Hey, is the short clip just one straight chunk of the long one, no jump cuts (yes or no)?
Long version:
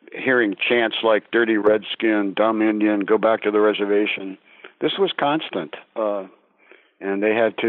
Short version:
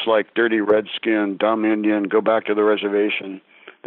yes